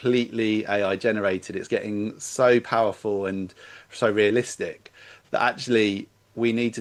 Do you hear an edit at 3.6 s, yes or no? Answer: no